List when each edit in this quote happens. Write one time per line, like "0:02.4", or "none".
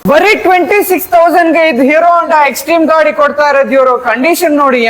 none